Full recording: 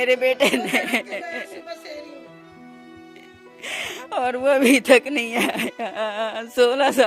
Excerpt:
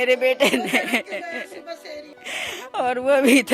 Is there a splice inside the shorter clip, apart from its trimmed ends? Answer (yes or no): yes